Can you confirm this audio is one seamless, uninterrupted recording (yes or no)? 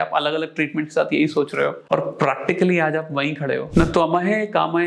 no